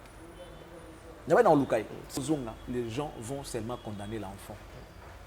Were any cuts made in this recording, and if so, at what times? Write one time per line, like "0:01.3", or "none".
0:02.2